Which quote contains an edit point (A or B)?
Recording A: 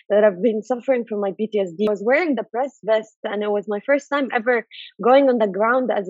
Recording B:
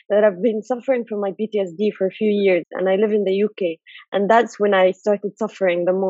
A